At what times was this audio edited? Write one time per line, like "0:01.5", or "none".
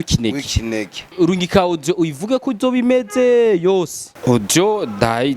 0:01.1
0:04.0